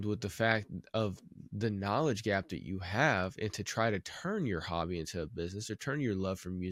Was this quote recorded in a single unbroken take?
yes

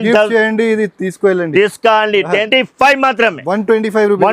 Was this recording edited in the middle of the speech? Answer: yes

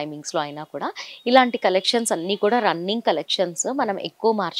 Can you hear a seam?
no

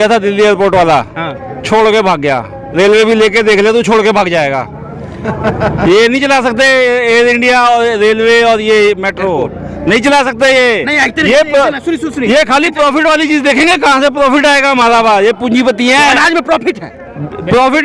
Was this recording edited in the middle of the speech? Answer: no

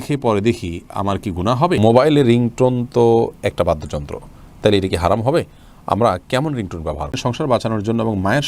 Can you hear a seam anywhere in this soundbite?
yes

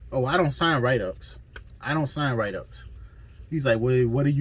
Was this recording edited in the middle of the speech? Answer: no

